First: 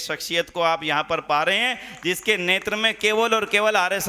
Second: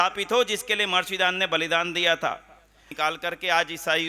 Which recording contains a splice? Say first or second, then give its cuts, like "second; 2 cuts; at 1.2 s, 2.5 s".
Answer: second; 1 cut; at 2.9 s